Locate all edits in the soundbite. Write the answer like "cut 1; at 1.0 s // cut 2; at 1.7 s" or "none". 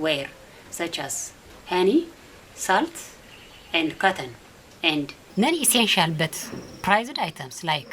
cut 1; at 5.2 s